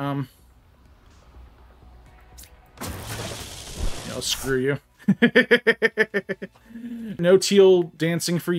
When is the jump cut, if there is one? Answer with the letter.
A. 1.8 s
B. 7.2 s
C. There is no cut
B